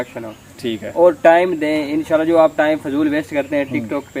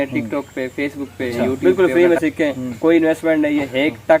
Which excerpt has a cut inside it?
second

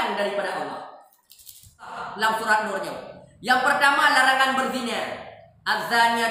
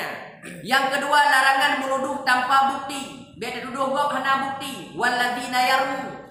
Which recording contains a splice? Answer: first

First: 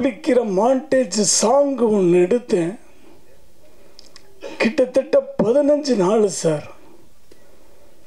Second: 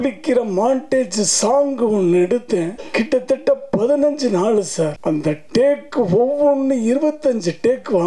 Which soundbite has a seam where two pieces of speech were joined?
second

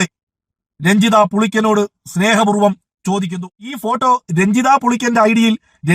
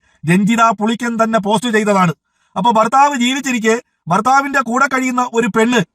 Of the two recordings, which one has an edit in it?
first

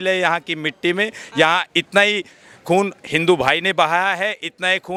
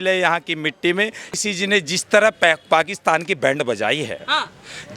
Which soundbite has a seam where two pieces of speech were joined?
second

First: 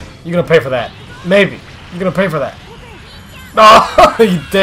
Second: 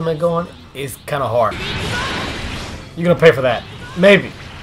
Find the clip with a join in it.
second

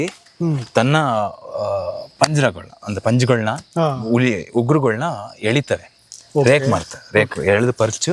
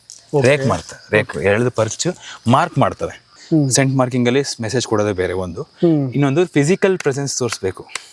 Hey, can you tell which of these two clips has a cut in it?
second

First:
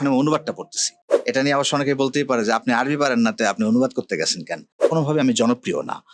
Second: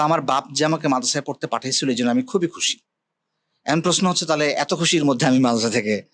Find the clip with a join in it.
first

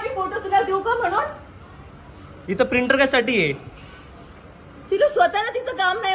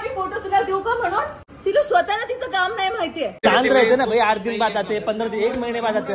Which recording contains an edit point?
second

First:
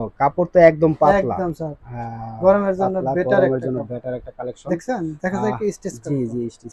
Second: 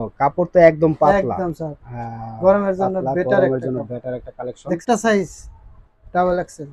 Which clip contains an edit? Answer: second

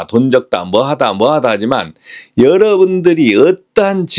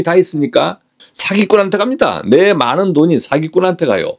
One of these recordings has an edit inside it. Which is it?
second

